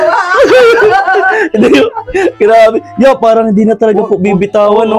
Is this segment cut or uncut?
uncut